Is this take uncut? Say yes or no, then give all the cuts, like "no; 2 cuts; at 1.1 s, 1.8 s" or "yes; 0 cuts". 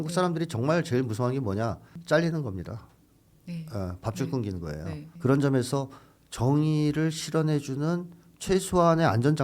no; 1 cut; at 5.1 s